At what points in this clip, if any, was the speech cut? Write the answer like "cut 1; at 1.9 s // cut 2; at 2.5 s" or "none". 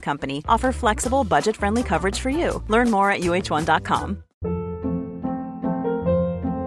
cut 1; at 4.3 s